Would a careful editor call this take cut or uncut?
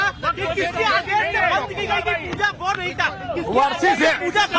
cut